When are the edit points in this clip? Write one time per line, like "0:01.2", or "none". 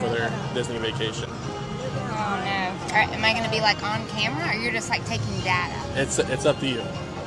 none